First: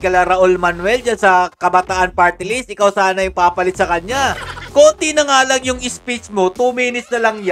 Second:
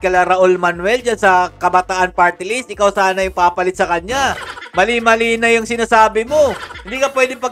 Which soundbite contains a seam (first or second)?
first